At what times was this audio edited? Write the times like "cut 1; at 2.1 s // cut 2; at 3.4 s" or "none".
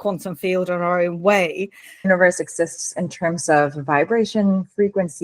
cut 1; at 2.1 s